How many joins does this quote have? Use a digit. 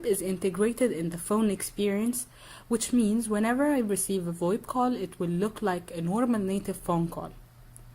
1